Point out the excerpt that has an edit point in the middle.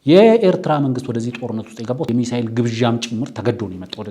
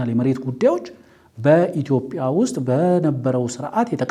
first; 1 cut; at 2.1 s

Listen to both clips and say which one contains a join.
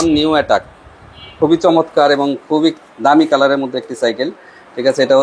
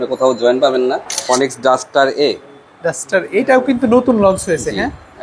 second; 1 cut; at 1.1 s

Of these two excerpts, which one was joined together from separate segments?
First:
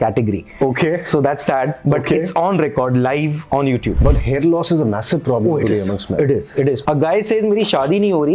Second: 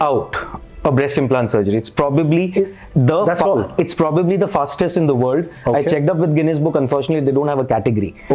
first; 2 cuts; at 4.0 s, 6.8 s

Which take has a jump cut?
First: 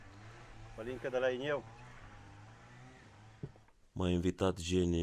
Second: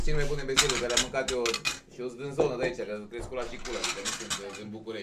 first; 1 cut; at 3.7 s

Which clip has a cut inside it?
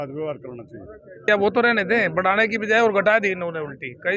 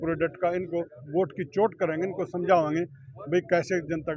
first; 1 cut; at 1.3 s

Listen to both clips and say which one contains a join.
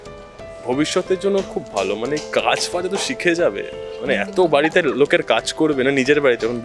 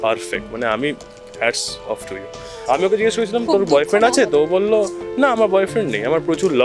second; 1 cut; at 2.6 s

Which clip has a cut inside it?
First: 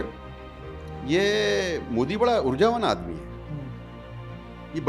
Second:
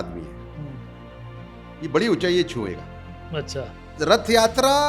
second; 1 cut; at 3.9 s

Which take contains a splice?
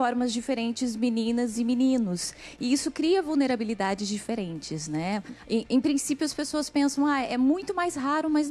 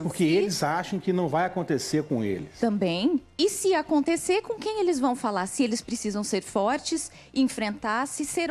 second; 1 cut; at 1.6 s

